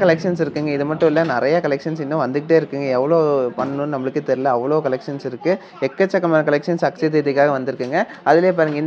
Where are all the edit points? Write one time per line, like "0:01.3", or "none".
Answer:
none